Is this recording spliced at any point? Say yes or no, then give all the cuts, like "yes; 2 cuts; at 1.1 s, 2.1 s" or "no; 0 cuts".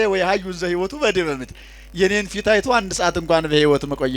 no; 0 cuts